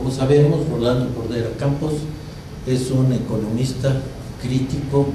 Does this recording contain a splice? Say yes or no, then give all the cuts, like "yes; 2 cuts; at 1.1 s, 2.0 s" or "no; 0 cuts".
no; 0 cuts